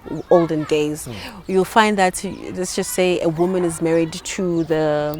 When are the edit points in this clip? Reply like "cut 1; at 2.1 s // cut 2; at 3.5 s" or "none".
none